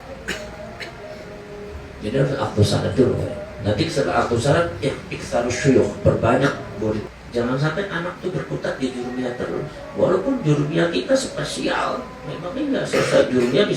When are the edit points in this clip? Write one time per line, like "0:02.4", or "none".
0:07.1